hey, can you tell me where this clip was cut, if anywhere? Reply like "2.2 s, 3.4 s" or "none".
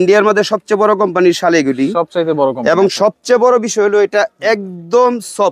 none

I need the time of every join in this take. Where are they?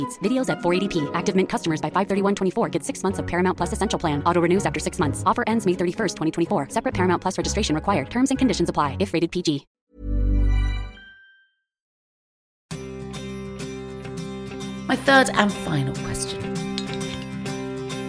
none

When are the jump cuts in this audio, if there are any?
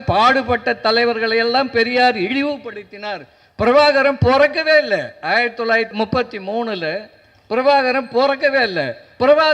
5.9 s

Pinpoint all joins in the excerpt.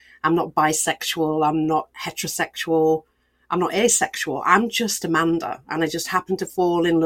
none

